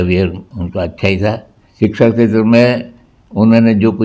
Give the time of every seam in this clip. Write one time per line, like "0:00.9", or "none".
0:01.6